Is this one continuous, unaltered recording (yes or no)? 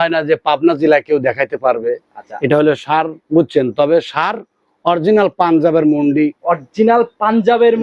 no